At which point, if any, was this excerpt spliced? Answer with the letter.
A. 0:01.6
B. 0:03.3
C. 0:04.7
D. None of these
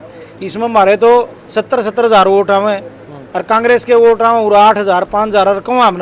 D